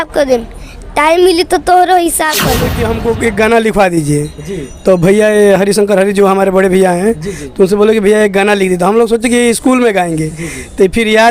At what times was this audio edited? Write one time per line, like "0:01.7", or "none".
0:02.7